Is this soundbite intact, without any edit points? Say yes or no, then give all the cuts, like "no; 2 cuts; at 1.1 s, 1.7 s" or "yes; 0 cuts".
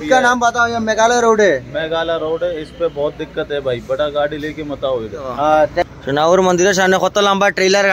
no; 1 cut; at 5.8 s